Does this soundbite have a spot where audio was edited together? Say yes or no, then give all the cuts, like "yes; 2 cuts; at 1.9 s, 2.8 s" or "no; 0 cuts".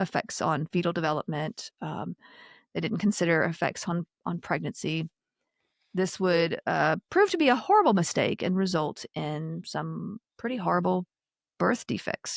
no; 0 cuts